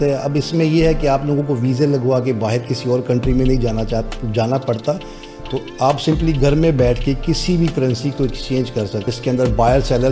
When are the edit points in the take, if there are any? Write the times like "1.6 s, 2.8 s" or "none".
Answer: 9.1 s